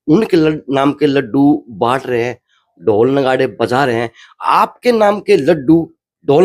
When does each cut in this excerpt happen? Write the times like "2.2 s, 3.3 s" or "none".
none